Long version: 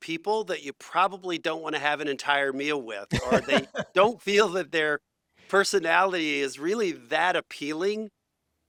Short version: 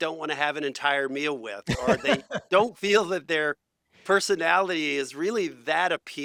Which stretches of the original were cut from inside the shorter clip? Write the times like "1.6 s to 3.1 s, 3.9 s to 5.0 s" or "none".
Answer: none